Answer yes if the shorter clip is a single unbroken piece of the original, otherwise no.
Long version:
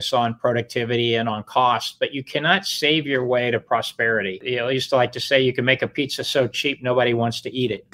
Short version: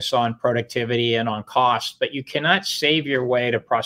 yes